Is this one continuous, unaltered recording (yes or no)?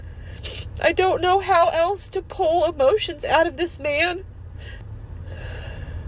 no